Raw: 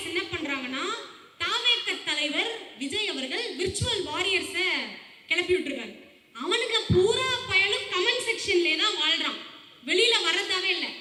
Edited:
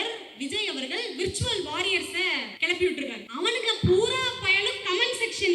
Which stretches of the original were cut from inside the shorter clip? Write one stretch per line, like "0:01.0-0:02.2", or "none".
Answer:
0:04.9-0:05.2
0:05.9-0:06.3